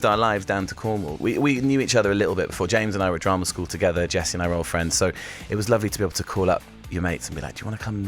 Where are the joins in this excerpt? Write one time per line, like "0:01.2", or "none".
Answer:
0:01.1